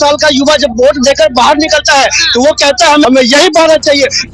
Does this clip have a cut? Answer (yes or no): yes